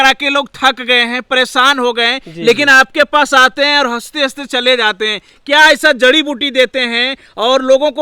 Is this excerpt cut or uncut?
uncut